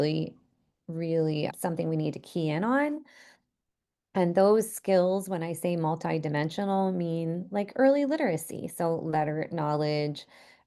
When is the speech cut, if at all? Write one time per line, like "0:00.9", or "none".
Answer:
0:01.5